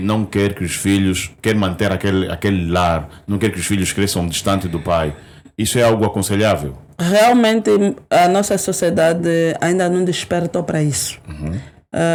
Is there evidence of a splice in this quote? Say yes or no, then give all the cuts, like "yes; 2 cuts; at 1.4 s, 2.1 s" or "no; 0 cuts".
no; 0 cuts